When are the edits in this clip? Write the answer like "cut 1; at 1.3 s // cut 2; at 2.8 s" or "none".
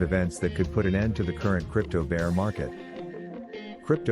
none